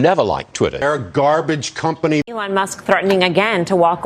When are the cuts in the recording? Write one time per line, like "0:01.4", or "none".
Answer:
0:00.8
0:02.3